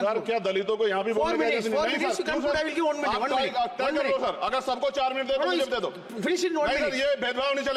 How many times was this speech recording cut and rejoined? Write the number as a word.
zero